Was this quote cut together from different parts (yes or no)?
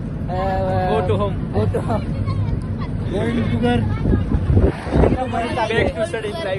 no